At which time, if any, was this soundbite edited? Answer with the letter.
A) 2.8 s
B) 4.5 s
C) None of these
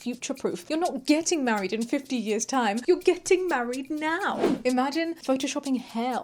B